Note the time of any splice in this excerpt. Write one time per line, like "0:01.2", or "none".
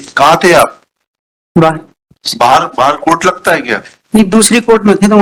none